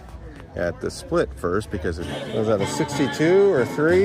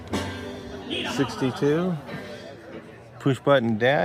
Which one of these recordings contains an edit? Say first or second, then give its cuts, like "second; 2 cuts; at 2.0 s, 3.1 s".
first; 1 cut; at 2.1 s